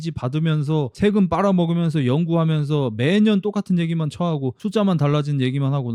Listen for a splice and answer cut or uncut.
uncut